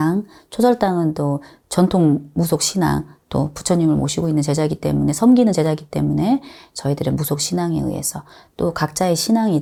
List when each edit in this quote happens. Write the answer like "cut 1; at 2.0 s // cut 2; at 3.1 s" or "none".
none

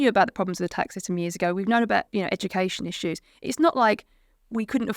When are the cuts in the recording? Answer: cut 1; at 2.1 s

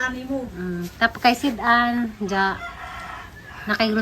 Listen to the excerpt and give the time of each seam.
none

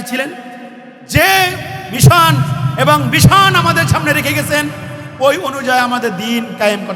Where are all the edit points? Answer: none

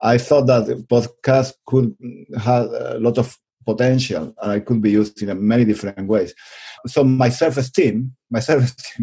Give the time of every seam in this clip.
cut 1; at 6.7 s

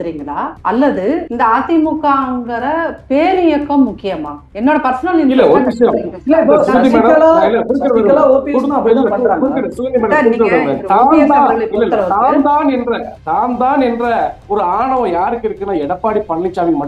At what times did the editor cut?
none

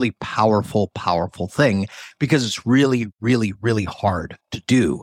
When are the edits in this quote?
cut 1; at 2.0 s

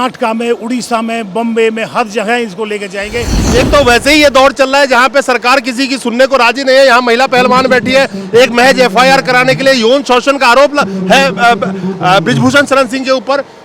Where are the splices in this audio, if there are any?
cut 1; at 3.4 s

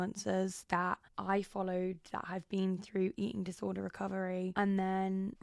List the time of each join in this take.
none

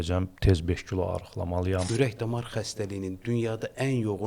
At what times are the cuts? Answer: cut 1; at 1.9 s

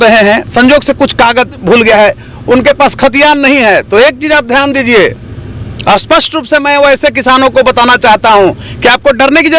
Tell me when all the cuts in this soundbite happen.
none

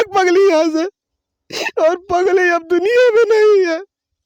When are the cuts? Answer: none

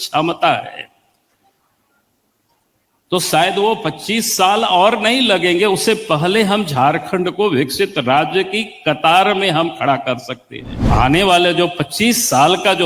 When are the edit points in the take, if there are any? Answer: cut 1; at 10.8 s

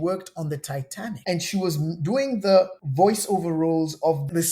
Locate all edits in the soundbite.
cut 1; at 1.2 s

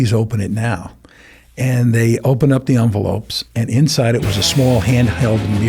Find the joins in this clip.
none

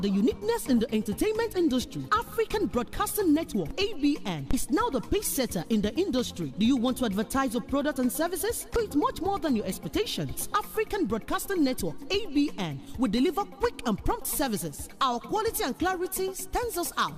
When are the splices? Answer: cut 1; at 8.8 s

